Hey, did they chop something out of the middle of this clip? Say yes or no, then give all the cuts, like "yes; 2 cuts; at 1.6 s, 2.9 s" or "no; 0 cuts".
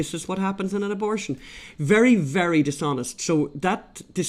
no; 0 cuts